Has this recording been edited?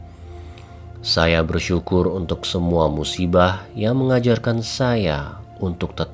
yes; 1 cut; at 1.1 s

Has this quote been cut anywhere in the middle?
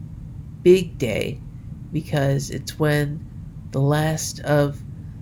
no; 0 cuts

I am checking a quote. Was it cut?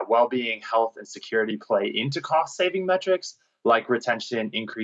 no; 0 cuts

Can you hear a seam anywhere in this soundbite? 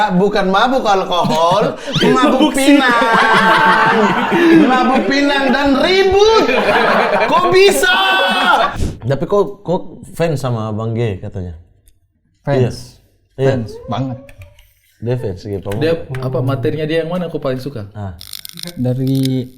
yes; 1 cut; at 8.8 s

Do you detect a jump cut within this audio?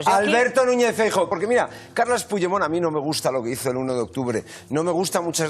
yes; 1 cut; at 1.3 s

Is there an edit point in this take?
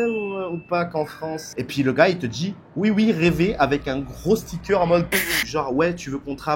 yes; 2 cuts; at 1.5 s, 5.4 s

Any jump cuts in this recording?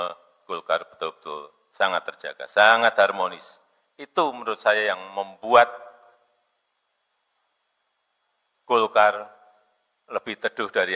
no; 0 cuts

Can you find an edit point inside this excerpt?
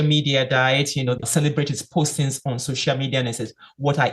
yes; 1 cut; at 1.2 s

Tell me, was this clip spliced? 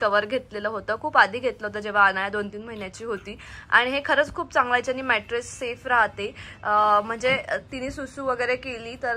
no; 0 cuts

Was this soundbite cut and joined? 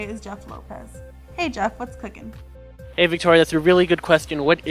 no; 0 cuts

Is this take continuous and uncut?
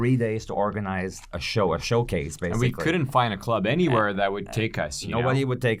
yes; 0 cuts

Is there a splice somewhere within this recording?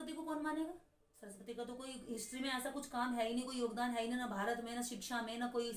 no; 0 cuts

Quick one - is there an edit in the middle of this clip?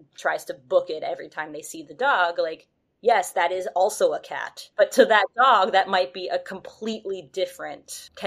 yes; 1 cut; at 4.6 s

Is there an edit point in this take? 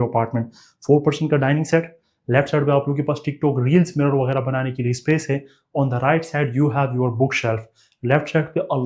no; 0 cuts

